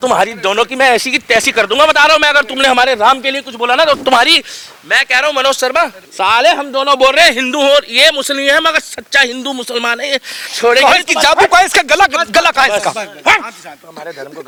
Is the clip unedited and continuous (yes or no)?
yes